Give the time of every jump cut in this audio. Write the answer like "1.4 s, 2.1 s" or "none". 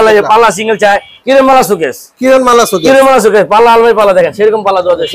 1.1 s